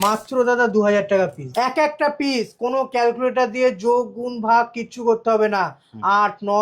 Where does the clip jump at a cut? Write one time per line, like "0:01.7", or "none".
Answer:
0:01.5